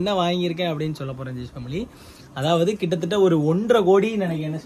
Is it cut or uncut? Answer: uncut